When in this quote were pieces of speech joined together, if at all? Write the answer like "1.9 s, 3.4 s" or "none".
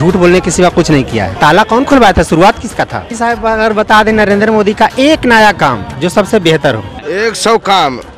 1.3 s, 3.1 s, 7.0 s